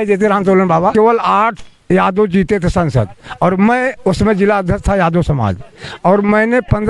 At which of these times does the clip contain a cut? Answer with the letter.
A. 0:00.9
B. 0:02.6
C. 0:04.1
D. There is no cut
A